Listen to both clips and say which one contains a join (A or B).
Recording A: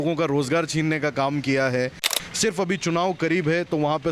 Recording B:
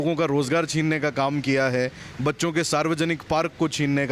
A